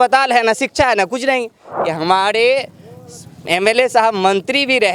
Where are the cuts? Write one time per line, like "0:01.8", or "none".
0:01.7